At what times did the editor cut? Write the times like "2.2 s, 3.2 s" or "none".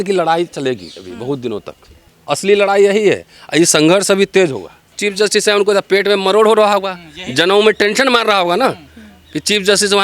2.1 s, 5.0 s